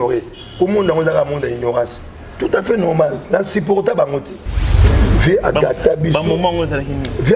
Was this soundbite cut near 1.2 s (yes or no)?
no